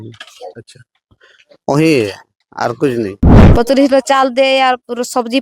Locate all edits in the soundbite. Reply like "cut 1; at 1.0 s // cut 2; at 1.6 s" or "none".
cut 1; at 3.3 s